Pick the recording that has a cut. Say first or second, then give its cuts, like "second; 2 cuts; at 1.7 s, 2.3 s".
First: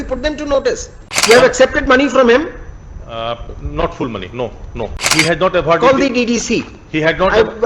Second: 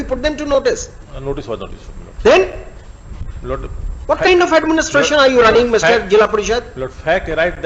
first; 2 cuts; at 1.1 s, 5.0 s